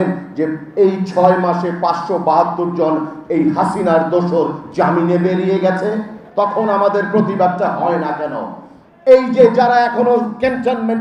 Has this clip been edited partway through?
no; 0 cuts

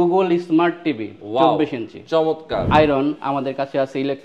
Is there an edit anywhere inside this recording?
yes; 1 cut; at 2.6 s

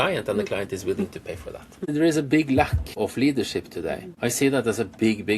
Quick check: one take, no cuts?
no; 3 cuts; at 1.9 s, 2.9 s, 4.1 s

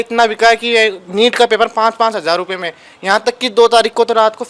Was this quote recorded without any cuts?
yes; 0 cuts

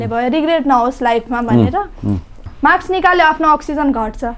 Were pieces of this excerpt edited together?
yes; 1 cut; at 2.4 s

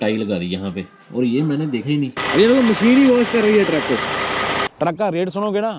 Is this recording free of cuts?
no; 2 cuts; at 2.2 s, 4.7 s

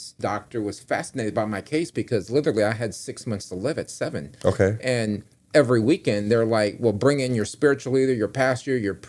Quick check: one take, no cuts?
yes; 0 cuts

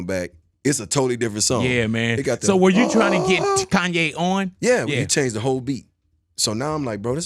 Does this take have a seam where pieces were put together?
yes; 1 cut; at 4.9 s

